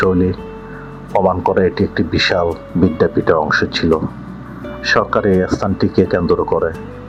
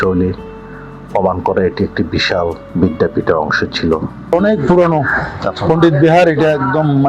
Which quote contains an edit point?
second; 1 cut; at 4.3 s

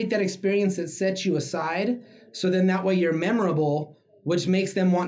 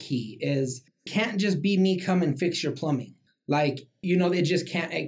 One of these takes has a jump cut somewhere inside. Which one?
second; 2 cuts; at 1.1 s, 3.7 s

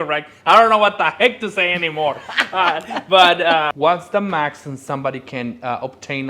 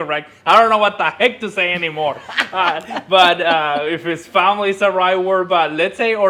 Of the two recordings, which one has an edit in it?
first; 1 cut; at 3.7 s

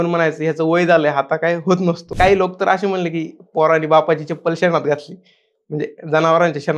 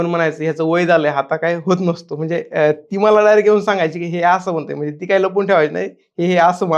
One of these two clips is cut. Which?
first; 1 cut; at 2.1 s

